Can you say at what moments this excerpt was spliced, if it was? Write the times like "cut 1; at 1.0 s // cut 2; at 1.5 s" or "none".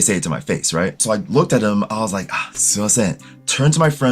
cut 1; at 1.0 s